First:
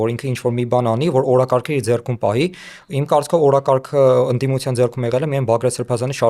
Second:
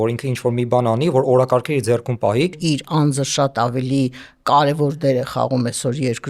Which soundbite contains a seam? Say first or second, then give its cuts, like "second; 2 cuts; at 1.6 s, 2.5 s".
second; 1 cut; at 2.6 s